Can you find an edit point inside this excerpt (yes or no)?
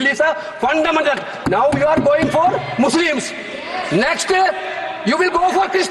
no